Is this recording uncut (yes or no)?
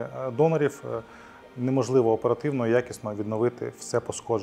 yes